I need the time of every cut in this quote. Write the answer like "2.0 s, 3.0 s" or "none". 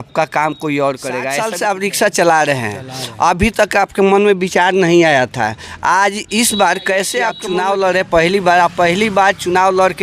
1.4 s, 7.4 s